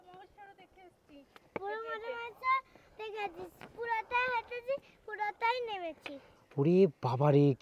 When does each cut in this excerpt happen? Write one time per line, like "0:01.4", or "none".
none